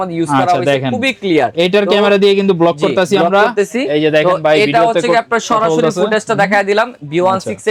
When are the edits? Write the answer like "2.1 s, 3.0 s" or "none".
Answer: none